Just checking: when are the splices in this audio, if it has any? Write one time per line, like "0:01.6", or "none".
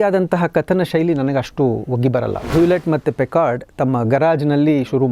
0:02.5